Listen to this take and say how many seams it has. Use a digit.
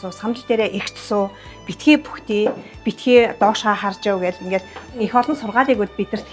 1